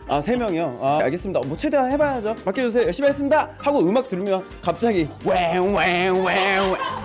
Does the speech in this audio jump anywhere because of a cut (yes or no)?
yes